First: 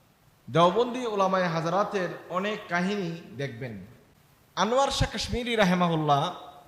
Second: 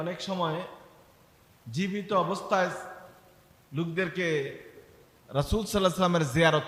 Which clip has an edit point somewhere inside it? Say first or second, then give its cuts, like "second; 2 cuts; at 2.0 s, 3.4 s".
first; 1 cut; at 4.7 s